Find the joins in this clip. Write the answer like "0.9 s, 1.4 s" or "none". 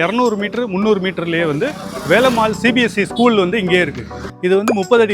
4.2 s